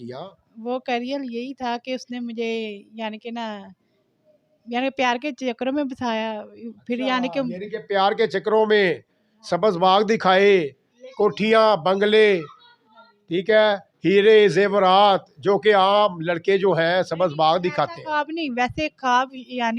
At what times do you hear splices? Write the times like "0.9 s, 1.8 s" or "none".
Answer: none